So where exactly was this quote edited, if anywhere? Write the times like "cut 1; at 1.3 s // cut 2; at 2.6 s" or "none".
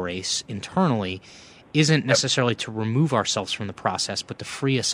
none